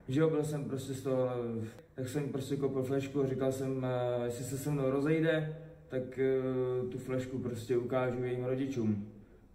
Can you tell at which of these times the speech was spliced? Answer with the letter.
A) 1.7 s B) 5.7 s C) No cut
A